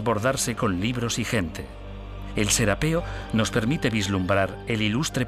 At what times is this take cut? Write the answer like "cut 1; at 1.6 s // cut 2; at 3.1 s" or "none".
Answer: none